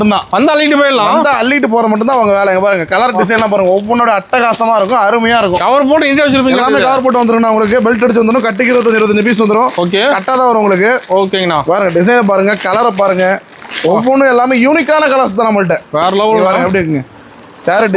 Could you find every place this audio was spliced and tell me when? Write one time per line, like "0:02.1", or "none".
none